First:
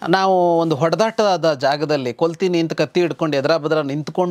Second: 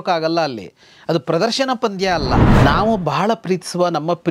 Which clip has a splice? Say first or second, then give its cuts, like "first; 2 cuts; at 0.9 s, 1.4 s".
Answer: second; 1 cut; at 2.5 s